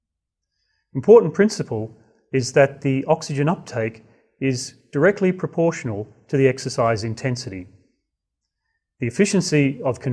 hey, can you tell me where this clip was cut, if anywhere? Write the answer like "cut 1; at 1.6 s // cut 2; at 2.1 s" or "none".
none